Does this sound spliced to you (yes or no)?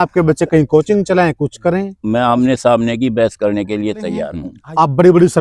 yes